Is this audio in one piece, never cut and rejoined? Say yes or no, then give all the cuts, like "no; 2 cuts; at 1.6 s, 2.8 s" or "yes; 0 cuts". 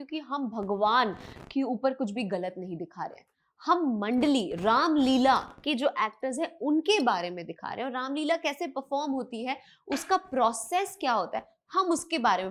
yes; 0 cuts